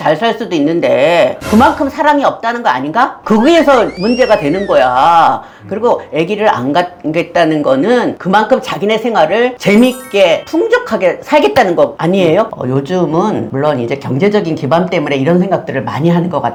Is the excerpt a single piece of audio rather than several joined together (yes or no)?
yes